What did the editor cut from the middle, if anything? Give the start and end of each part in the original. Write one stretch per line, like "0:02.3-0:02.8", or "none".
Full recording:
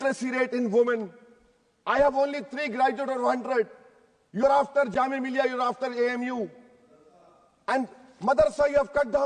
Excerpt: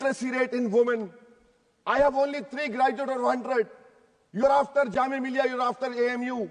none

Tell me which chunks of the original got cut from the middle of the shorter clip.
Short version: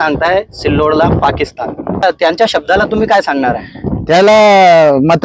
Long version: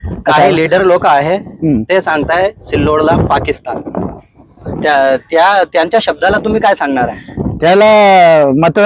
0:04.1-0:05.6

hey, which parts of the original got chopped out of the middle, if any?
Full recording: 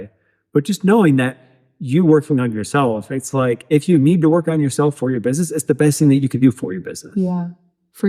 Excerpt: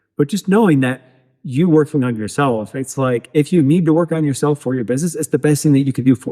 none

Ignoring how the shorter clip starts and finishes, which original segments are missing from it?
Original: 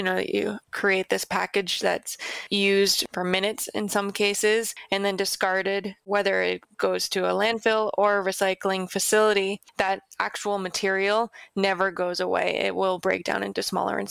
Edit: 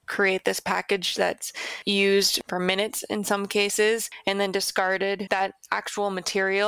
0:05.9-0:09.7

